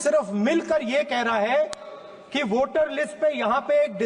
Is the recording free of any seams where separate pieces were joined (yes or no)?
yes